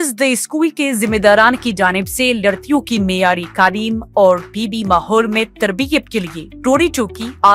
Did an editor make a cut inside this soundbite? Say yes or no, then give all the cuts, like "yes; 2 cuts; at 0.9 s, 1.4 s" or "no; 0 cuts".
no; 0 cuts